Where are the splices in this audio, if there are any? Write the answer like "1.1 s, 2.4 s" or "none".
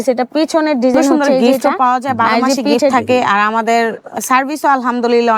2.9 s